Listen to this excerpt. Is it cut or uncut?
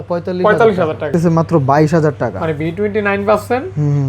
cut